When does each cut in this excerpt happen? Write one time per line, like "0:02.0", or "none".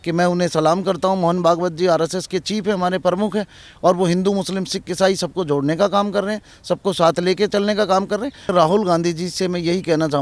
0:08.5